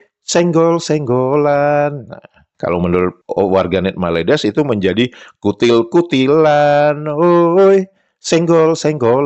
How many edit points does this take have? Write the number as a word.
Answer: zero